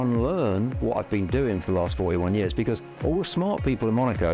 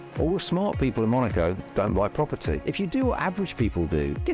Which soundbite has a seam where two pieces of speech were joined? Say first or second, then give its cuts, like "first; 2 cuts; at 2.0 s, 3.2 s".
second; 1 cut; at 2.6 s